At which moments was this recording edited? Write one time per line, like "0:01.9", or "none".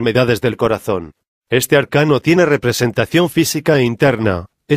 0:02.7